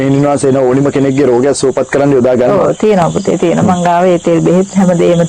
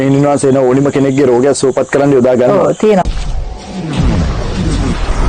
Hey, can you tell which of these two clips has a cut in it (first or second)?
second